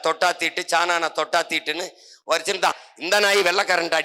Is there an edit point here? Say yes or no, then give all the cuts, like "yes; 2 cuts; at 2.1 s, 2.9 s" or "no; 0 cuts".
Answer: yes; 1 cut; at 2.9 s